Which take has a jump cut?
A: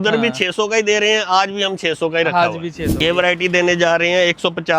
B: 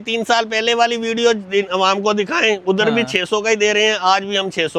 A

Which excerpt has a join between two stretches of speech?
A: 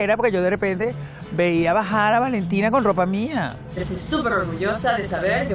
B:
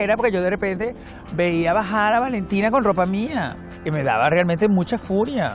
A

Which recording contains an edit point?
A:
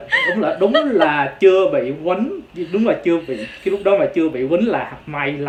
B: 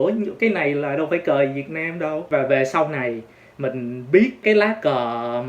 B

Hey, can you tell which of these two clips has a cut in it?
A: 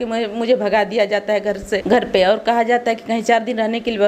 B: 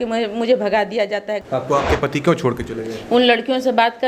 B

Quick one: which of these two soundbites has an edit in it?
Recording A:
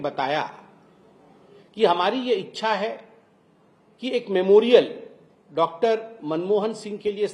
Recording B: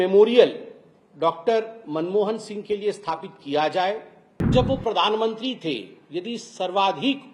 B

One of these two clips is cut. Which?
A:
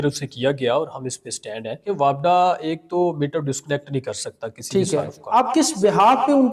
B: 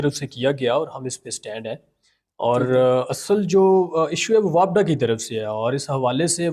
A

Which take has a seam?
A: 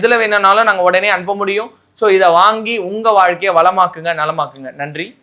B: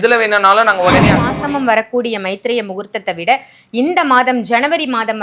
B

